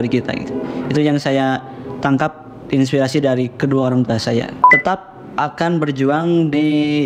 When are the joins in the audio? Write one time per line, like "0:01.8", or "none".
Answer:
0:04.7